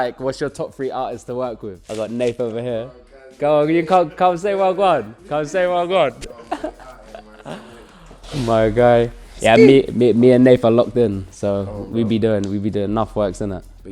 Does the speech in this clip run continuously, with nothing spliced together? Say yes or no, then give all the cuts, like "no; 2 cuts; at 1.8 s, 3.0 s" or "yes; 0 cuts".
no; 1 cut; at 1.8 s